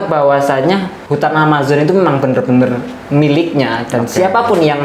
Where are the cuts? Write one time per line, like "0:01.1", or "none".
0:01.0